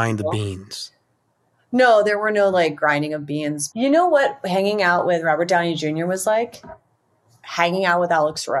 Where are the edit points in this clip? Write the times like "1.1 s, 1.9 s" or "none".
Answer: 3.6 s